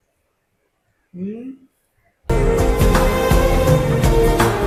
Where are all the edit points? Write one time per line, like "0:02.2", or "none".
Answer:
none